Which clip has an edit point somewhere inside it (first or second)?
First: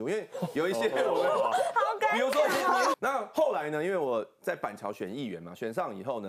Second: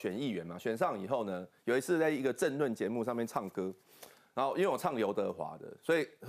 first